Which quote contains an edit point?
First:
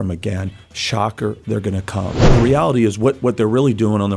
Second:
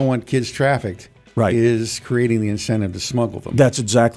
first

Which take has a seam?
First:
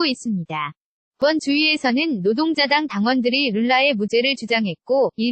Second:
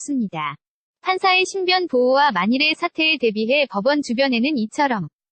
first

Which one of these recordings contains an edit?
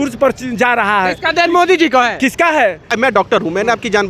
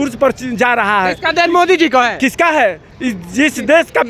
first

